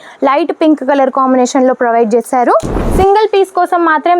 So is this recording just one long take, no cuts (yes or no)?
no